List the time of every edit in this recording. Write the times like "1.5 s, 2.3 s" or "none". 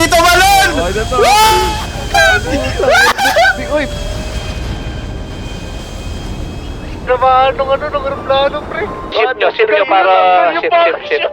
9.0 s